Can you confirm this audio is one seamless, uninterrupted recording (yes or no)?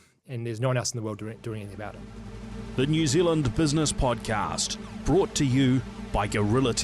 no